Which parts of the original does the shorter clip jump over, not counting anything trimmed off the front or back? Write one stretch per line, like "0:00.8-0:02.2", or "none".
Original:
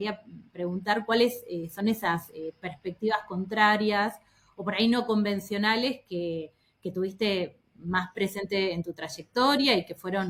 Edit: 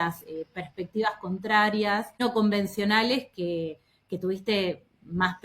0:04.3-0:05.0